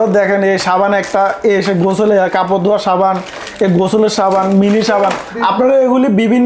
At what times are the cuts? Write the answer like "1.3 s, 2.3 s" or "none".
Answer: none